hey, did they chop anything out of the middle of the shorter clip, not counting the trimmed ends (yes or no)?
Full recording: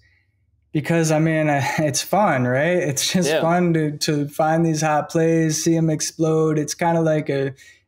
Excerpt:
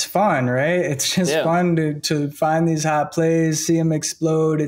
no